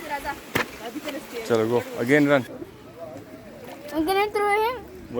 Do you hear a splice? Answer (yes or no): yes